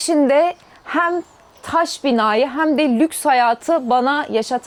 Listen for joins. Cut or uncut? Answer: uncut